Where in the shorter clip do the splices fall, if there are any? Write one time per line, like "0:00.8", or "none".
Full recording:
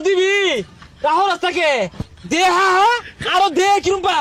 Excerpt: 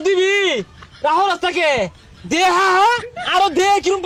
none